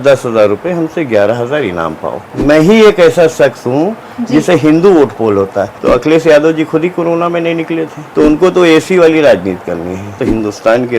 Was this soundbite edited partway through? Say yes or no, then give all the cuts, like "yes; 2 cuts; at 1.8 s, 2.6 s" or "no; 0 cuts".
yes; 4 cuts; at 2.3 s, 5.7 s, 8.0 s, 10.2 s